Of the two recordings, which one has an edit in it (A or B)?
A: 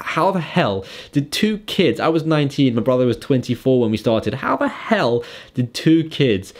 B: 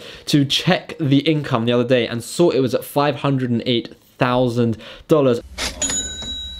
B